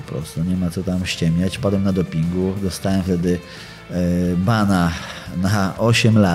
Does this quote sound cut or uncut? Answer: uncut